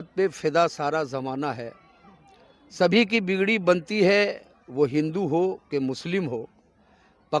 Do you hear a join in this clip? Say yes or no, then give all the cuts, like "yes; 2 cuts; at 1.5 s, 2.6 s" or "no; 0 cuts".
no; 0 cuts